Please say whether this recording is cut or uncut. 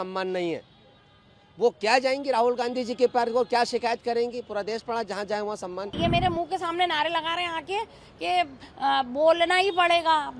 cut